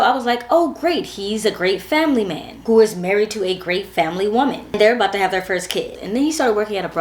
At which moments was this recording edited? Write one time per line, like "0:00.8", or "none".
none